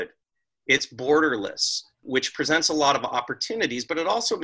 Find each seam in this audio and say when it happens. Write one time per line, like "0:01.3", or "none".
0:02.0